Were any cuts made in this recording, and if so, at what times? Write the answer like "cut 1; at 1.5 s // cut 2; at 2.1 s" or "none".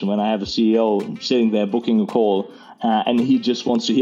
none